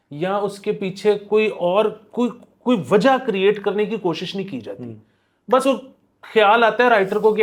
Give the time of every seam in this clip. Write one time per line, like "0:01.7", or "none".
none